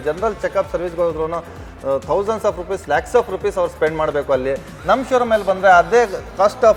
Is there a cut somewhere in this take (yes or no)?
no